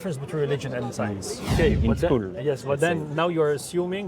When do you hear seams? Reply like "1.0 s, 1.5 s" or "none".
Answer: 1.5 s

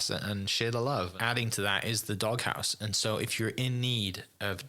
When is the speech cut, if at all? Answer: 1.1 s

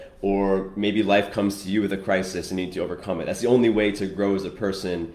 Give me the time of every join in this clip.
none

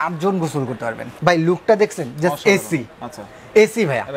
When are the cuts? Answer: 1.1 s

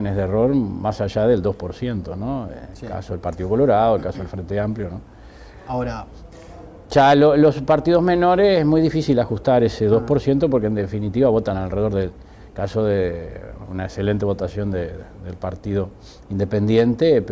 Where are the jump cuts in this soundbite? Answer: 4.3 s

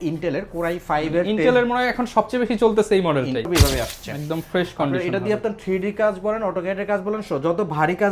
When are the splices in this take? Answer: 3.5 s

